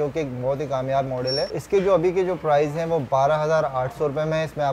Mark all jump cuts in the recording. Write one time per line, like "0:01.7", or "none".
0:01.5